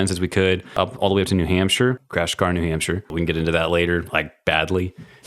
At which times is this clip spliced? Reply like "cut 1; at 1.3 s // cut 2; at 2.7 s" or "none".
cut 1; at 0.8 s // cut 2; at 2.0 s // cut 3; at 3.1 s